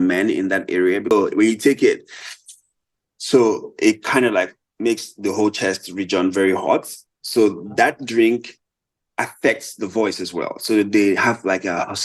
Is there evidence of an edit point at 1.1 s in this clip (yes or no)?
yes